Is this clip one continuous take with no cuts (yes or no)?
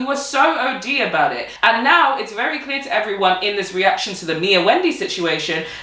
no